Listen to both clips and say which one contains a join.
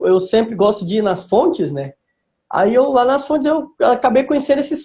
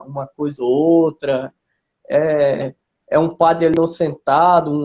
second; 1 cut; at 3.7 s

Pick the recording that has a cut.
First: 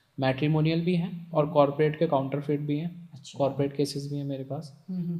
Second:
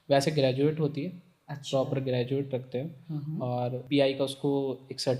second; 1 cut; at 3.8 s

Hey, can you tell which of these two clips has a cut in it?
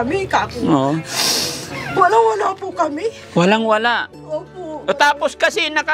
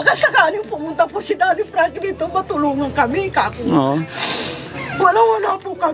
first; 1 cut; at 4.8 s

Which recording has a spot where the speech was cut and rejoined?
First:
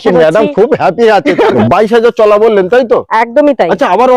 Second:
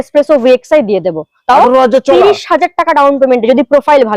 first; 1 cut; at 1.6 s

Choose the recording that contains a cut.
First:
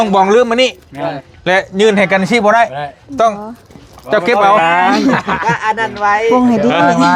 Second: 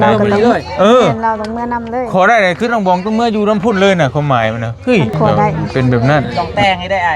second; 1 cut; at 5.6 s

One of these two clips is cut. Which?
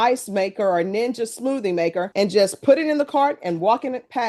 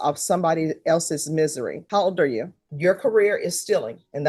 second; 1 cut; at 2.6 s

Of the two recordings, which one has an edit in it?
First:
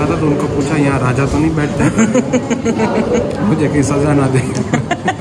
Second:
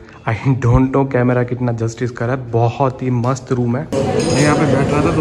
second; 1 cut; at 3.9 s

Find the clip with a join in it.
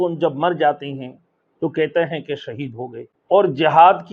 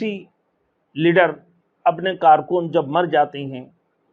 first; 1 cut; at 3.1 s

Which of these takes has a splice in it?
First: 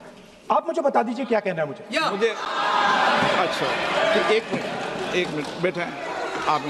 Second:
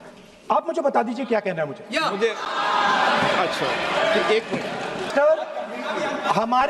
second; 1 cut; at 5.1 s

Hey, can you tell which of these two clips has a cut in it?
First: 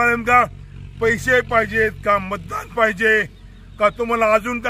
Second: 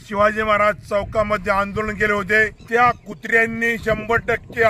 second; 1 cut; at 2.6 s

